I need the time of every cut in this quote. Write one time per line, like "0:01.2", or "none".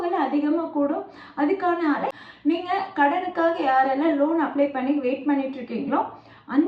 0:02.1